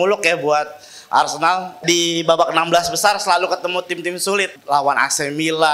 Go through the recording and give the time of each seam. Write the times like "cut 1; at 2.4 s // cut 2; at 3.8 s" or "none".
cut 1; at 1.8 s // cut 2; at 4.6 s